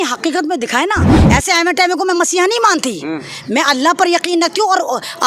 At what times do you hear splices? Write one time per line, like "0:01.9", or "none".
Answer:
0:01.1